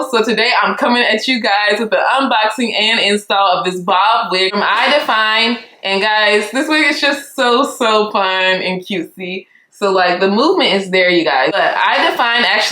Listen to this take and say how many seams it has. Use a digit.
2